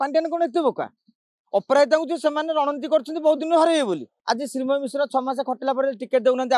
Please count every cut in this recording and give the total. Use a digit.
1